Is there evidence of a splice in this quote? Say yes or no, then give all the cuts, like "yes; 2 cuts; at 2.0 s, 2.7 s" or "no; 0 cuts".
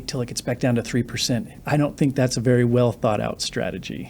yes; 1 cut; at 1.5 s